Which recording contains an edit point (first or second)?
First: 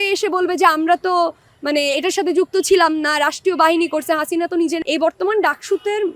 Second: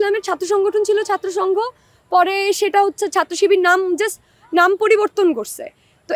first